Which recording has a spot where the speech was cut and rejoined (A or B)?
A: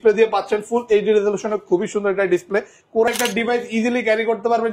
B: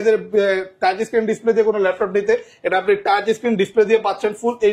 A